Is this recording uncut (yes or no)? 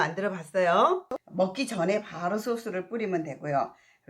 no